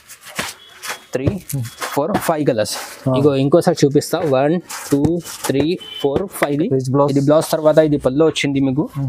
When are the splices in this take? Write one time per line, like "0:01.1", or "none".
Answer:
0:06.5